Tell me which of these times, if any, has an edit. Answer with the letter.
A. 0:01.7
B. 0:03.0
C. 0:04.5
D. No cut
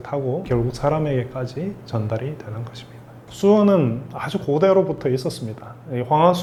D